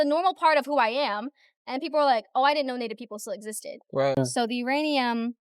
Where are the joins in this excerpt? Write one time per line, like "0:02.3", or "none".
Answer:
0:04.2